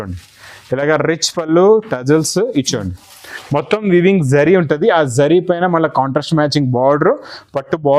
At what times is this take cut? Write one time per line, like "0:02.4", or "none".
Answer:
none